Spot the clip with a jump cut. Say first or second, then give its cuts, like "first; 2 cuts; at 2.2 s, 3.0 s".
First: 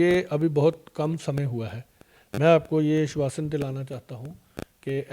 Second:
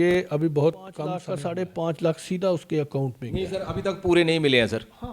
second; 1 cut; at 1.2 s